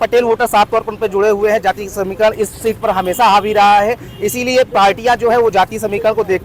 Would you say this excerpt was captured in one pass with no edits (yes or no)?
yes